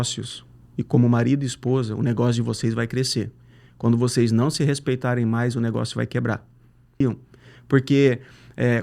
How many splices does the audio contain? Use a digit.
1